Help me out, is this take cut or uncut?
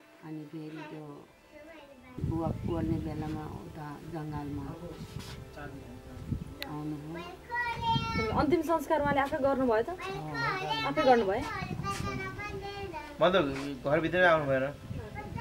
cut